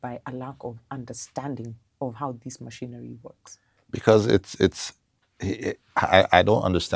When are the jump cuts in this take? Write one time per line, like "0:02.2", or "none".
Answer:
none